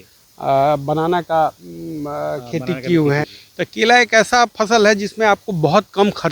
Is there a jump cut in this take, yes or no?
yes